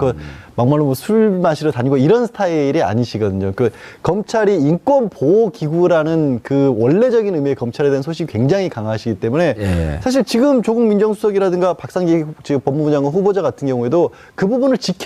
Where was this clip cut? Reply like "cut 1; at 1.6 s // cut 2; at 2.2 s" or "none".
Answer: cut 1; at 8.8 s